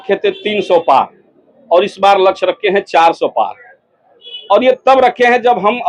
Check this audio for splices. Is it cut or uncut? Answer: uncut